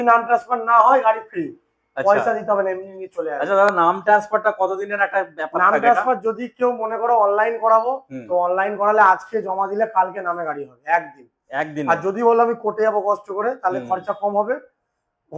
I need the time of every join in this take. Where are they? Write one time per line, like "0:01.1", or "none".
none